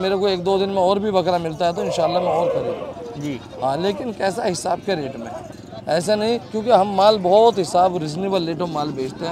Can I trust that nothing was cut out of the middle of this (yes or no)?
yes